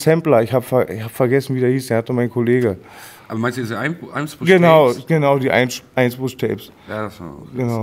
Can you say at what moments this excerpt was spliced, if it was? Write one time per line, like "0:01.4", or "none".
none